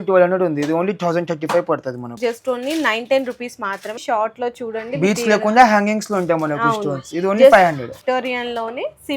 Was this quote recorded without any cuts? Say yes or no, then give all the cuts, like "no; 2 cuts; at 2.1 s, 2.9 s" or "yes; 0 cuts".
no; 3 cuts; at 2.1 s, 4.0 s, 8.0 s